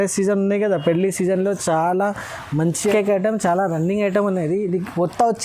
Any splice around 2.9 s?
yes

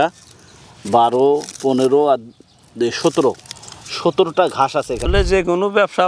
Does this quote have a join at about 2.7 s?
no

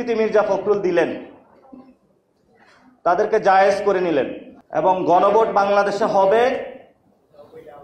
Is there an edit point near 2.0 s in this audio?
no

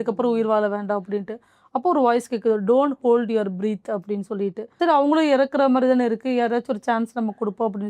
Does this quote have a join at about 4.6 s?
yes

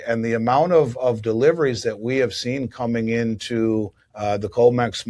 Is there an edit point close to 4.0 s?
yes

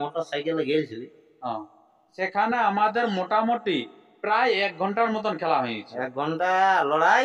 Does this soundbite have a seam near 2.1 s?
yes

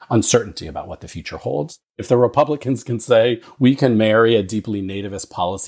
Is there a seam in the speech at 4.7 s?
no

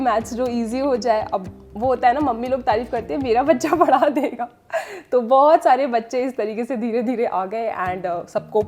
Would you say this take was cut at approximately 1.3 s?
no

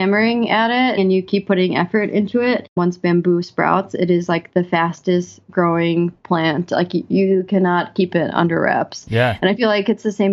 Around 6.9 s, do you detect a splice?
no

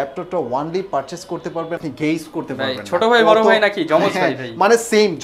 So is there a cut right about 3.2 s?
no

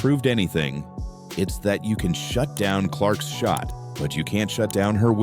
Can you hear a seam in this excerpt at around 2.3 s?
no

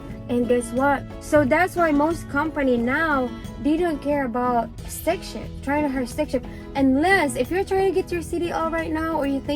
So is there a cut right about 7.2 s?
no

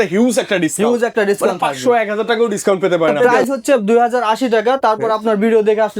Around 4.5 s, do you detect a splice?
no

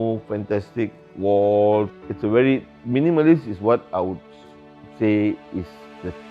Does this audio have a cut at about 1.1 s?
yes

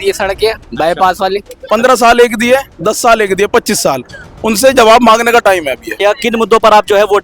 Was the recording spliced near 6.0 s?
yes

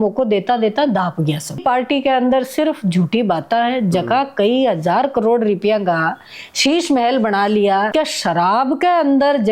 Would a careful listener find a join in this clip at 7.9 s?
yes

